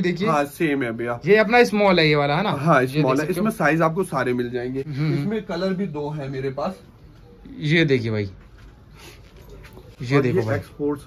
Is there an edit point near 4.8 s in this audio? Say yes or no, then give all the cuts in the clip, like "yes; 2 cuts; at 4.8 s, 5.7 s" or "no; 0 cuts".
no; 0 cuts